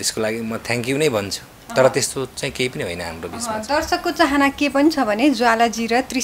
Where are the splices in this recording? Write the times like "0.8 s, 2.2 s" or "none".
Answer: none